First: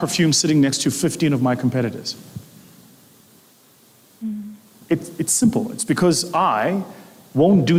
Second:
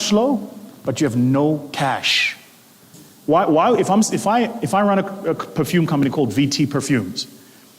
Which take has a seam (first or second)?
second